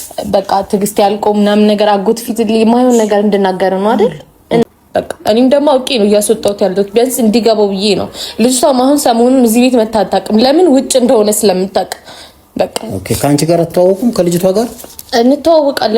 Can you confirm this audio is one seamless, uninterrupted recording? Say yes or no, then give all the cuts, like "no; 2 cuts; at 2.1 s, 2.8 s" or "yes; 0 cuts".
no; 1 cut; at 4.6 s